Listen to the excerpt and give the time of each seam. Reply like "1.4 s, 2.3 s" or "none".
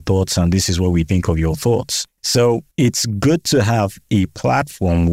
2.1 s